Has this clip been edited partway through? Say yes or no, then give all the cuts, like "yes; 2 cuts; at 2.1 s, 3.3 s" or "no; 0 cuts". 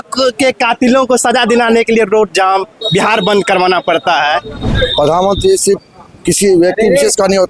yes; 1 cut; at 4.5 s